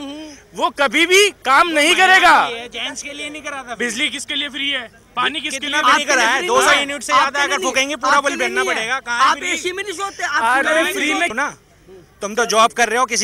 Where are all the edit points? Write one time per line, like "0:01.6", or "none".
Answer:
0:11.3